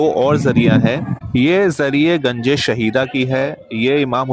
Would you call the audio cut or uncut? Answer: cut